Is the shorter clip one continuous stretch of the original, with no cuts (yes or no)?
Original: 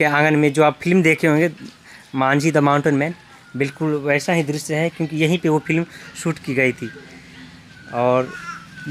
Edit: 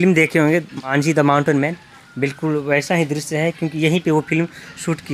no